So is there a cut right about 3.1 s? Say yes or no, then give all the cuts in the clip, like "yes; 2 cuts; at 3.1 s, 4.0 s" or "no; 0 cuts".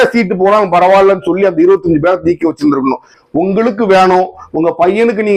yes; 1 cut; at 3.1 s